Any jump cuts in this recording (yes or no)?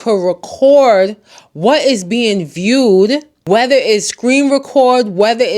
yes